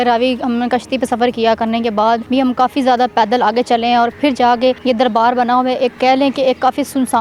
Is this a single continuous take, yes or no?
no